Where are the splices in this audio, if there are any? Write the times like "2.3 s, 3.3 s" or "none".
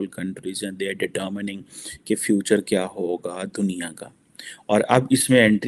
none